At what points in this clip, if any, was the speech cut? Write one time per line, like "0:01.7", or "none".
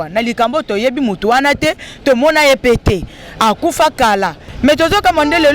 0:04.4